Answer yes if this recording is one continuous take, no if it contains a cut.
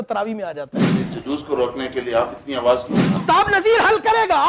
no